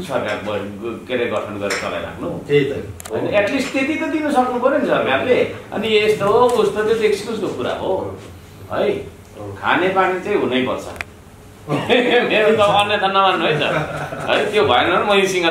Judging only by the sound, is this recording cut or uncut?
uncut